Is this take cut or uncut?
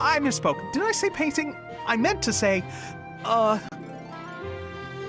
cut